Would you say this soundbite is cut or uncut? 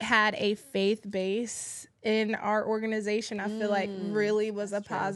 uncut